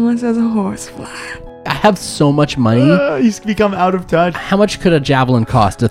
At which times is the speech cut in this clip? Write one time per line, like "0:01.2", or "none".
0:01.7
0:04.4